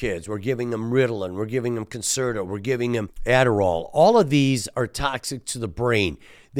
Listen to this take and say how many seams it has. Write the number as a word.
one